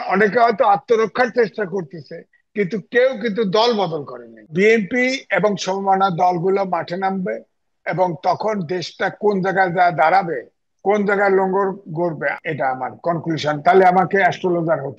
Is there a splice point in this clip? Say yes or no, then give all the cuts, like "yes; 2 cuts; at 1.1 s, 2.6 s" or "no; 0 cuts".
yes; 2 cuts; at 4.5 s, 12.4 s